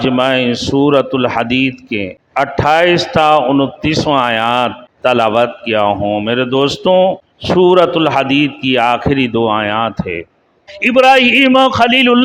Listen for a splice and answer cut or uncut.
cut